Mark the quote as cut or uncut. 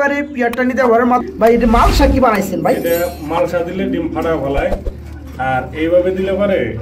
cut